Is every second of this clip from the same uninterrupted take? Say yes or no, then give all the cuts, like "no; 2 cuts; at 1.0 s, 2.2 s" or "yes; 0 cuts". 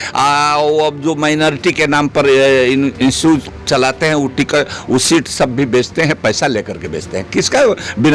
yes; 0 cuts